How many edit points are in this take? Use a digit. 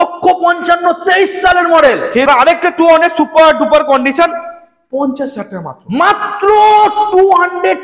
1